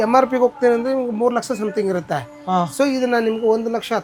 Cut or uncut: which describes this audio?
uncut